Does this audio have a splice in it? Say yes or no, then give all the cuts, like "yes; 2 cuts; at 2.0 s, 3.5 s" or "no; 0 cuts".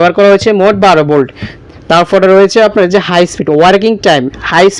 no; 0 cuts